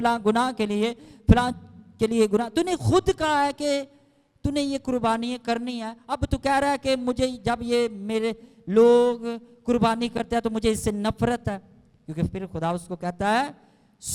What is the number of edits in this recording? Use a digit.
0